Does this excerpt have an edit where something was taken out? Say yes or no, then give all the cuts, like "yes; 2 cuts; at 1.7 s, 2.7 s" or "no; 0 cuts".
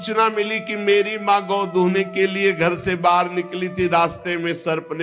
no; 0 cuts